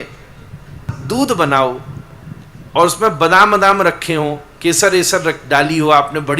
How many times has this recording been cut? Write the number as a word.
one